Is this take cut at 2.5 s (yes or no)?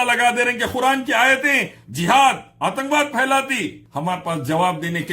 no